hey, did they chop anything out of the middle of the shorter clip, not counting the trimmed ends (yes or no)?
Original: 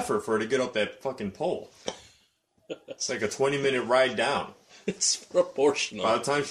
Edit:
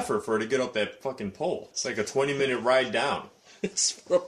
yes